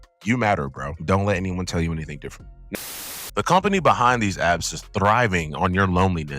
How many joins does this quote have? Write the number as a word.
one